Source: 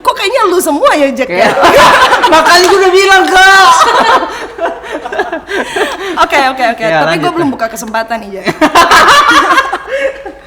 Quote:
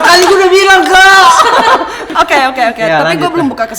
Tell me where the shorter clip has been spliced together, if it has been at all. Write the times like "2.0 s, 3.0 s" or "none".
2.0 s